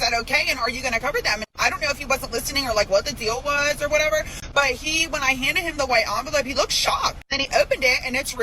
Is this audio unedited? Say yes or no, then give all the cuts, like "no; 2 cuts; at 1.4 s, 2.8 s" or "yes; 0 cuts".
no; 3 cuts; at 1.5 s, 4.4 s, 7.3 s